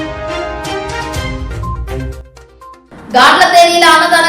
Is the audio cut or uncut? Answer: cut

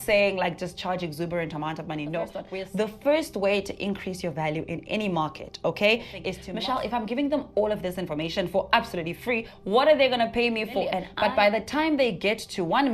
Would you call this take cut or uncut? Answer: cut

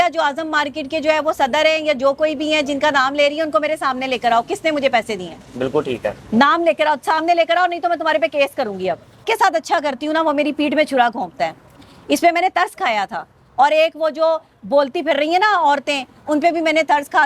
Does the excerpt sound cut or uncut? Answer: cut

